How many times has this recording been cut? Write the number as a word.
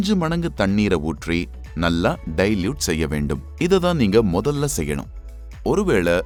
zero